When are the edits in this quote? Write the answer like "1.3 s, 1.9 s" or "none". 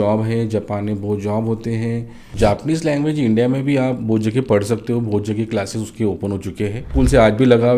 2.2 s, 6.9 s